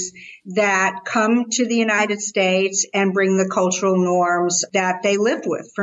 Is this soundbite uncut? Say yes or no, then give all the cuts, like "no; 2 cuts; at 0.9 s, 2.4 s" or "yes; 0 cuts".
no; 1 cut; at 4.6 s